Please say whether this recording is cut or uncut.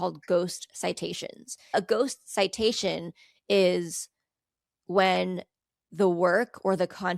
cut